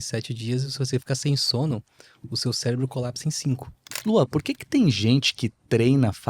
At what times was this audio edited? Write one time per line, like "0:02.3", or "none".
0:03.9